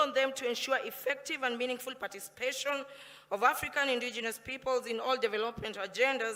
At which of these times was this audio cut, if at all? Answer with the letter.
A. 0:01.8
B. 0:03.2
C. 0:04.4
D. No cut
D